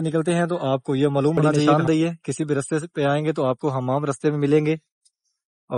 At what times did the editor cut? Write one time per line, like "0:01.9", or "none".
0:01.6